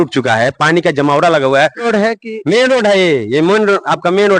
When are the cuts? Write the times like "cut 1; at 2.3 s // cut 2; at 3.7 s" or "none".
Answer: cut 1; at 1.9 s